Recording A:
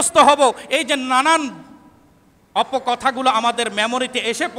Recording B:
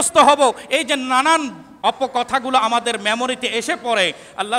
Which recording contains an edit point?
B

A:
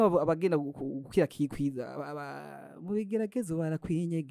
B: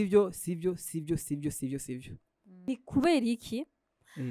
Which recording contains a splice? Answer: B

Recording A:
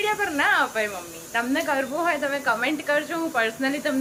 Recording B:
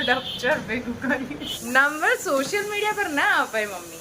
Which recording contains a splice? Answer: B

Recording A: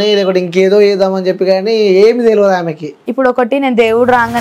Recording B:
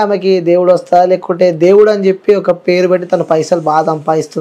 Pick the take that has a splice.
A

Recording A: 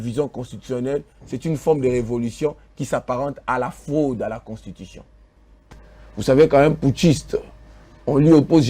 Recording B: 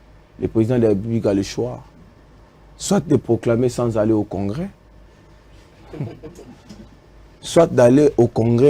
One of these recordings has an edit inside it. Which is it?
A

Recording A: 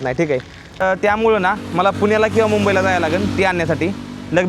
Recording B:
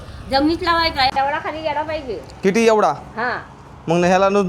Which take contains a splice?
A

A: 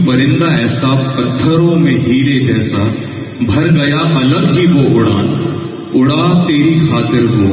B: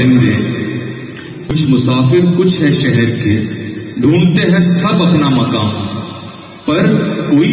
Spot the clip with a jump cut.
B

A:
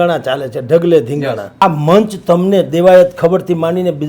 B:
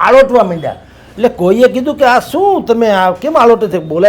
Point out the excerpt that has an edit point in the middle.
A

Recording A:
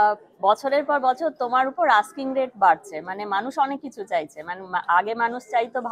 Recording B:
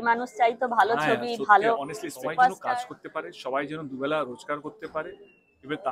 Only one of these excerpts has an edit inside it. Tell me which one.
B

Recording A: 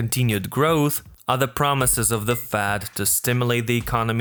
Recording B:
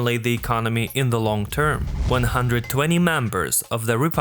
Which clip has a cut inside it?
B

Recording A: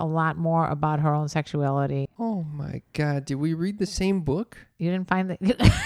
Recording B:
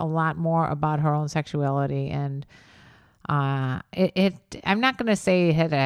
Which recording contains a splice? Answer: A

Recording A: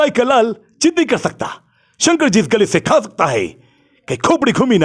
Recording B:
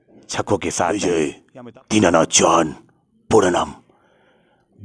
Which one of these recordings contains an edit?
B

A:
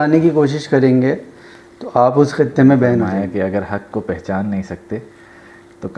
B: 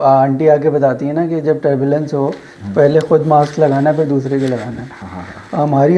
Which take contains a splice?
A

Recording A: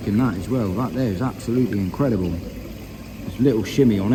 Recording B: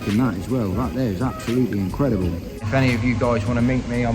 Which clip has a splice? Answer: B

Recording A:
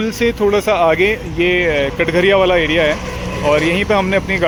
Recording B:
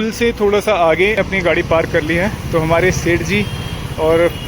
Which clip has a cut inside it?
B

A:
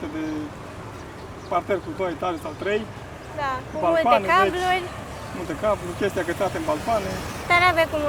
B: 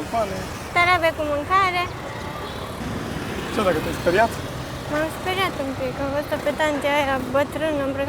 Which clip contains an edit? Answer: B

